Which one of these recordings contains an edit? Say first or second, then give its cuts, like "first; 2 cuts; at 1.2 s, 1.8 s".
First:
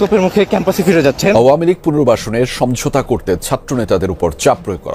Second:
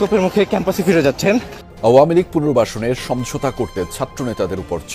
first; 1 cut; at 1.3 s